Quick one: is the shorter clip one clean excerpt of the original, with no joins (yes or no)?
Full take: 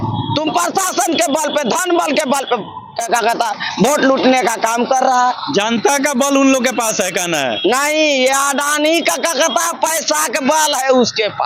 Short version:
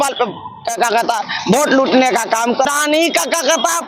no